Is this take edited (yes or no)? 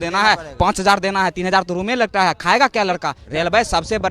yes